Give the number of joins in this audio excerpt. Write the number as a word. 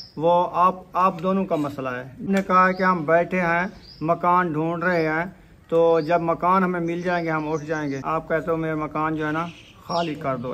two